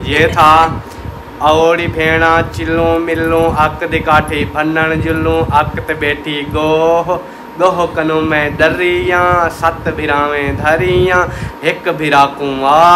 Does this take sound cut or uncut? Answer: uncut